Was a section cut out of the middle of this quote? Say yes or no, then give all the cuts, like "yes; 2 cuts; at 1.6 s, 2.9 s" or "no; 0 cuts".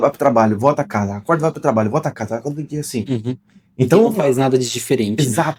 no; 0 cuts